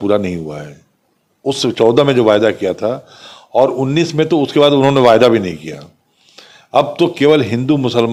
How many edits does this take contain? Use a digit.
0